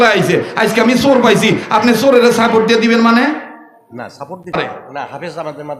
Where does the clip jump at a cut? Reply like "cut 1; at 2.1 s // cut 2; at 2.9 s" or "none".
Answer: cut 1; at 4.7 s